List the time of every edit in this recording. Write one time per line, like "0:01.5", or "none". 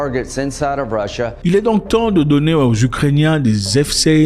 none